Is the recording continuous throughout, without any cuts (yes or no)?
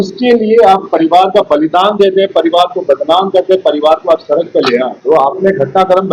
no